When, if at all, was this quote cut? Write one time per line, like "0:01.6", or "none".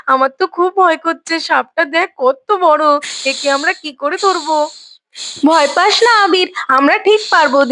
none